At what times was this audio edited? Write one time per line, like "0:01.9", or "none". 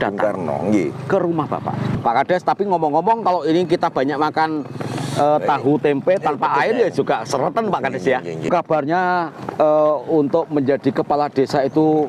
0:01.9
0:08.5